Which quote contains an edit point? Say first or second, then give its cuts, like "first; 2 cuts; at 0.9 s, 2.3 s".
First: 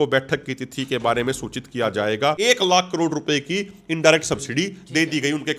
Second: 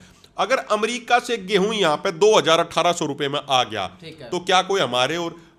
first; 1 cut; at 2.4 s